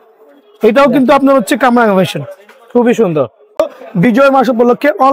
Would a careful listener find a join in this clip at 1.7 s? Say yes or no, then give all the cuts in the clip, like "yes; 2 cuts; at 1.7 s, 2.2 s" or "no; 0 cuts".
no; 1 cut; at 3.6 s